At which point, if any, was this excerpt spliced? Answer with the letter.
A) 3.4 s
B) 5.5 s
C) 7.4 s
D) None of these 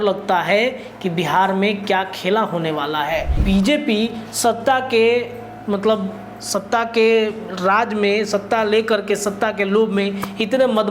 A